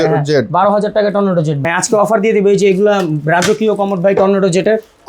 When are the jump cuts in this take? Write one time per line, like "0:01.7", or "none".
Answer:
0:01.6

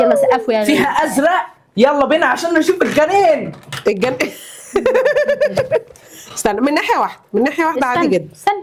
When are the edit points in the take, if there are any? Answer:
none

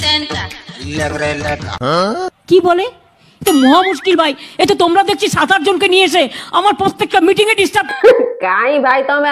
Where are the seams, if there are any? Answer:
0:07.9

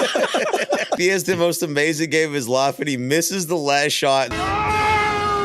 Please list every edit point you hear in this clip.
0:01.0
0:04.3

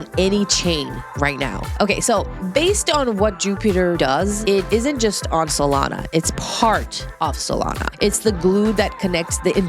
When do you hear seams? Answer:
none

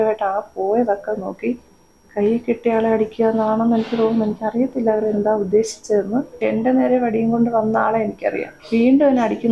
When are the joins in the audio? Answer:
0:06.3
0:08.5

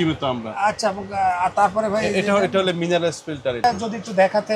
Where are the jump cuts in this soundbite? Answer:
0:03.6

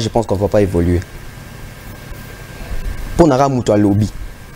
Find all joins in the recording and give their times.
none

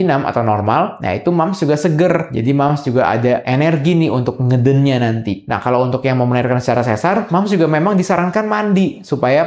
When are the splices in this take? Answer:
none

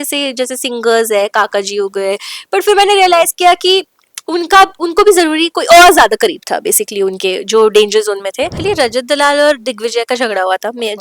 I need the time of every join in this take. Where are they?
0:08.6

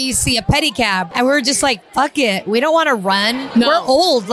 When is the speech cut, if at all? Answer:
0:01.1

